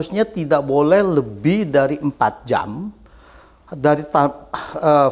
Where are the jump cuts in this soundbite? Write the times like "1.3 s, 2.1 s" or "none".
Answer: none